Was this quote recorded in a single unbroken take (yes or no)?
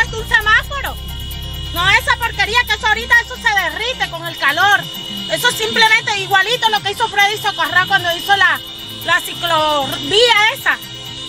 yes